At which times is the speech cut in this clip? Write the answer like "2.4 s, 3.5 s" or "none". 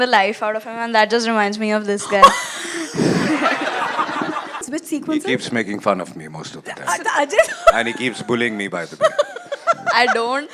4.7 s